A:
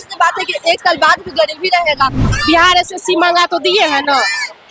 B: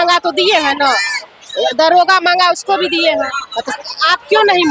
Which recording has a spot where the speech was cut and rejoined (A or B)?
A